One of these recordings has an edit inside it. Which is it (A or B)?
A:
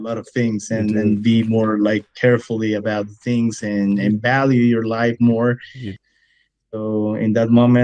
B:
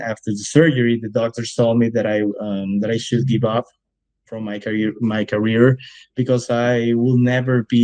A